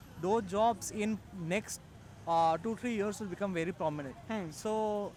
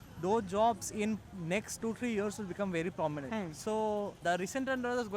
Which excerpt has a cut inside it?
second; 3 cuts; at 1.8 s, 3.2 s, 4.2 s

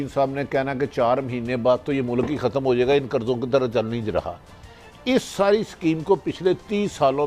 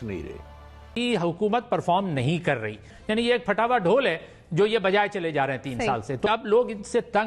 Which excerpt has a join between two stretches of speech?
second; 3 cuts; at 0.8 s, 2.9 s, 6.3 s

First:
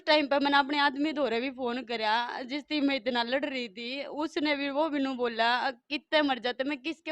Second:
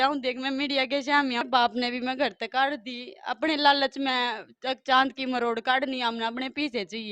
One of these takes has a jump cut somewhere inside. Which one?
second; 1 cut; at 1.4 s

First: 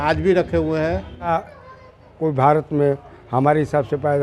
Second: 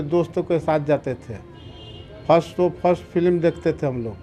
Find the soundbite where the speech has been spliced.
first; 1 cut; at 1.3 s

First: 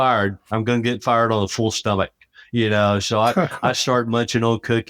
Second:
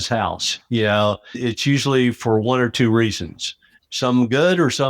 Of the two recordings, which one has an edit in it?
second; 2 cuts; at 1.4 s, 3.8 s

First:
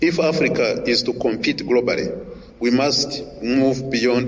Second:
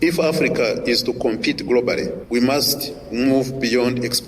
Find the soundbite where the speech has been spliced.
second; 1 cut; at 2.2 s

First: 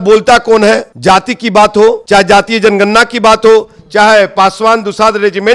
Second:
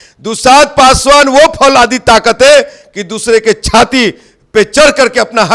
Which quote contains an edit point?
first; 2 cuts; at 0.9 s, 2.0 s

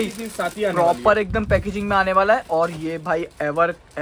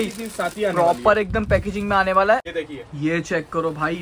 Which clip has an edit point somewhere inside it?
second; 1 cut; at 2.4 s

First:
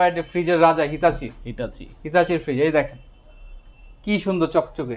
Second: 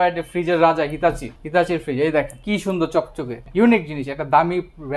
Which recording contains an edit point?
second; 3 cuts; at 1.3 s, 2.4 s, 3.4 s

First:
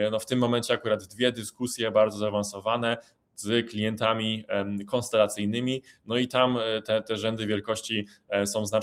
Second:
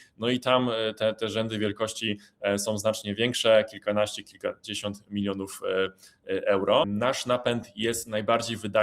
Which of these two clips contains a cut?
second; 1 cut; at 6.9 s

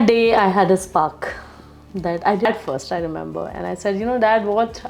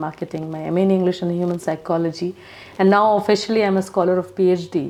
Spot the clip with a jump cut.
first; 1 cut; at 2.5 s

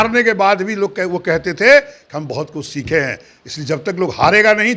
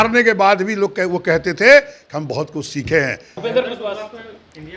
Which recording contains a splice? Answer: second; 1 cut; at 3.3 s

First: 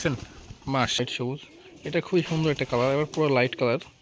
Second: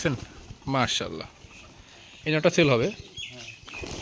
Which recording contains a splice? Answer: first; 1 cut; at 1.0 s

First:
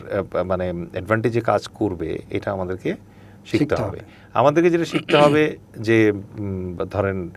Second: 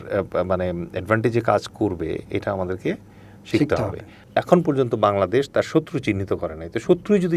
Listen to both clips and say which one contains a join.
second; 1 cut; at 4.2 s

